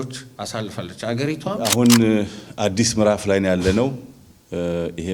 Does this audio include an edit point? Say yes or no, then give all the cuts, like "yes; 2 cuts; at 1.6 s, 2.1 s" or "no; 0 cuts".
yes; 1 cut; at 1.7 s